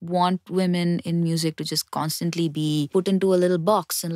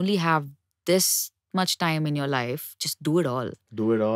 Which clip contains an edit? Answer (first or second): first